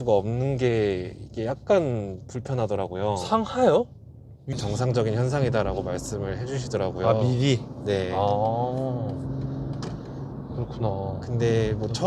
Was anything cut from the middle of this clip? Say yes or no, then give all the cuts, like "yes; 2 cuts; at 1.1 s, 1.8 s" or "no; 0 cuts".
yes; 1 cut; at 4.5 s